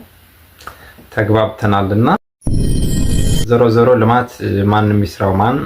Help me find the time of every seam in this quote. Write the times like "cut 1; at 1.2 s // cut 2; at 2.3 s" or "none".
cut 1; at 3.4 s